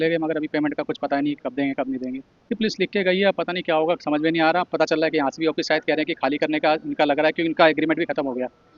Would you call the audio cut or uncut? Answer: cut